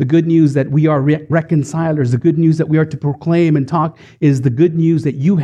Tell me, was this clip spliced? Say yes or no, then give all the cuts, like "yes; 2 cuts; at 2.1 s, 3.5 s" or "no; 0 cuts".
no; 0 cuts